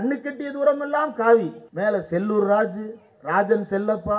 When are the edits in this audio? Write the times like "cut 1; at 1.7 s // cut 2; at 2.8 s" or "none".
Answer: cut 1; at 1.6 s